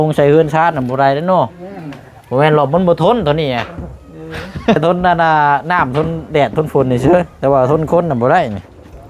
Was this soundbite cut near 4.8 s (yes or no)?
yes